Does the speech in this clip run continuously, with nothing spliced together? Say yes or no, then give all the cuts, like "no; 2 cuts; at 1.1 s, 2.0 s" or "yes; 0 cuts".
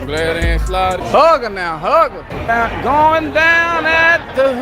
no; 2 cuts; at 1.0 s, 2.3 s